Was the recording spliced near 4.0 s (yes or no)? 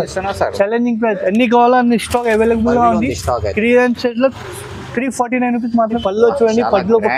no